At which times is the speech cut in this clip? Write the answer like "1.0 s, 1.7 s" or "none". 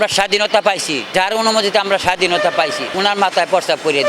1.0 s, 2.8 s